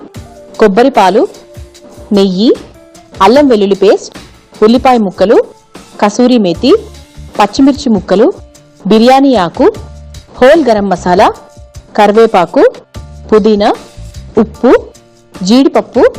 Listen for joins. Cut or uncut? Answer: uncut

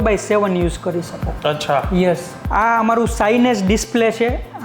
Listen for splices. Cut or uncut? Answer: cut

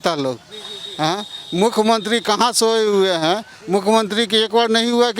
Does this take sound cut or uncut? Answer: uncut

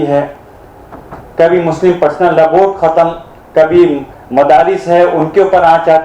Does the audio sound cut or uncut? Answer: uncut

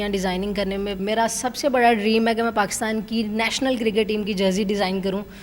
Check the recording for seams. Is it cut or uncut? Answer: cut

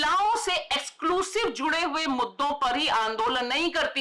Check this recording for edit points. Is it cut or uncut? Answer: uncut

